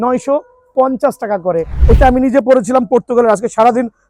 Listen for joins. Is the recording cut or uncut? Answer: cut